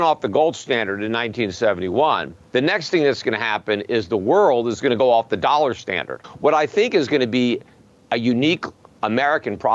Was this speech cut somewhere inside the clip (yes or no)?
yes